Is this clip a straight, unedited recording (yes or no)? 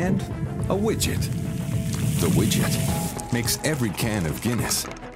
no